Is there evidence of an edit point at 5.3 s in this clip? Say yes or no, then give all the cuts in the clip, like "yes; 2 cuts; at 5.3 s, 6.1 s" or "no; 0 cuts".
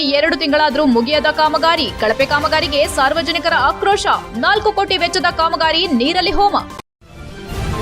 no; 1 cut; at 6.9 s